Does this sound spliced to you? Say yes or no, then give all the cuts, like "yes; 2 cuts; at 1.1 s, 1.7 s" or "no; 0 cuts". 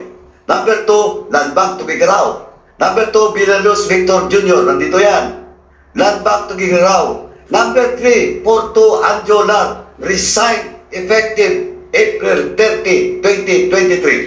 no; 0 cuts